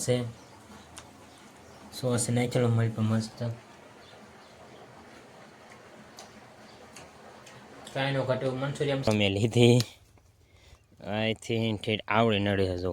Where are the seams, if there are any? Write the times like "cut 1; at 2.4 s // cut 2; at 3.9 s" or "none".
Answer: cut 1; at 9.1 s